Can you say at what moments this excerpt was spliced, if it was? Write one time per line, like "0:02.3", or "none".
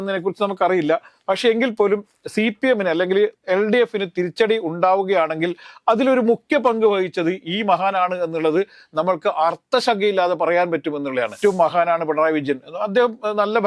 0:11.3